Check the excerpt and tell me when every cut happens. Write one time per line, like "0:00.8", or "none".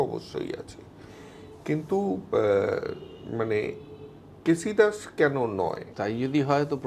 0:05.9